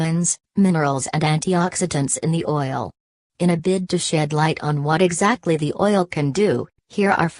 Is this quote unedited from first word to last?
yes; 0 cuts

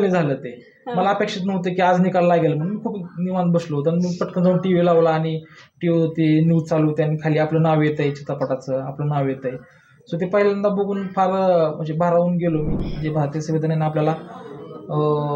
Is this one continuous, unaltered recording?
no; 1 cut; at 12.8 s

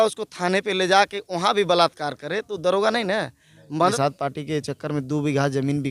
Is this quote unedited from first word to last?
no; 1 cut; at 3.9 s

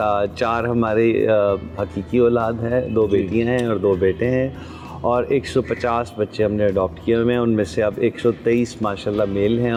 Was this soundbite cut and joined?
no; 0 cuts

